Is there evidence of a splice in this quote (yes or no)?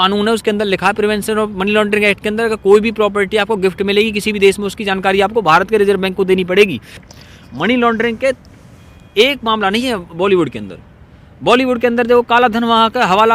yes